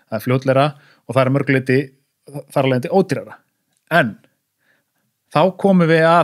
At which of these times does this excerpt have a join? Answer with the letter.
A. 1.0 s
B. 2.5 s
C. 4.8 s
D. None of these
D